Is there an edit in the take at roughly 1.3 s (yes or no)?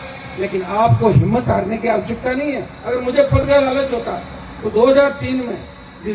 no